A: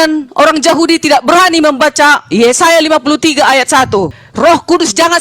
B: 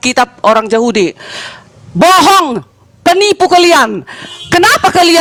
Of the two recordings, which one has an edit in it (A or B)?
A